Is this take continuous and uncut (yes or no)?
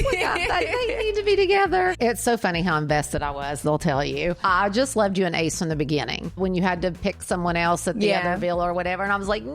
no